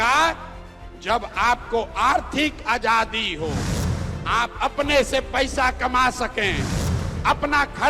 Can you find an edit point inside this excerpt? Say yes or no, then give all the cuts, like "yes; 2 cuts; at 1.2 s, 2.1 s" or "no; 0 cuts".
no; 0 cuts